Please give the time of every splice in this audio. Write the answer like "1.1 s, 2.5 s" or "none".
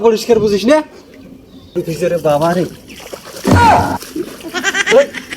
1.8 s

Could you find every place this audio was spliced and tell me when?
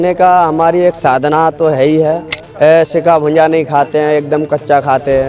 2.4 s

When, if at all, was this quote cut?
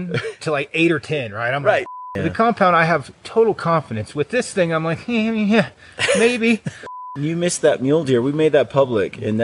2.0 s, 6.9 s

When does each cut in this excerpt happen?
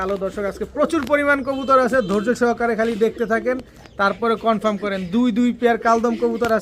none

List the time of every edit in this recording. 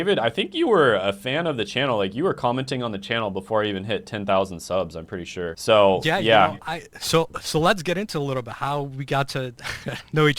6.2 s

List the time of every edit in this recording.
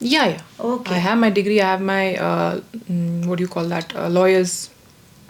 none

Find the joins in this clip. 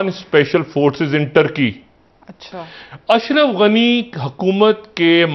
none

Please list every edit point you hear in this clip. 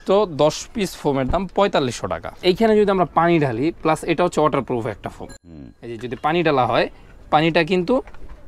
2.3 s

